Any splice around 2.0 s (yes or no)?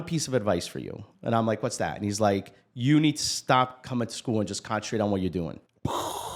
no